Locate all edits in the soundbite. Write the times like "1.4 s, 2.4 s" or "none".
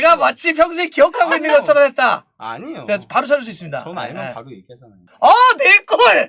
none